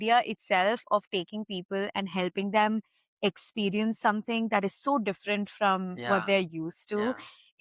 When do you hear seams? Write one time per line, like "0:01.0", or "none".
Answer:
none